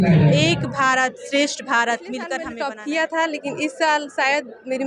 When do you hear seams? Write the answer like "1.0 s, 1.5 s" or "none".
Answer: 2.4 s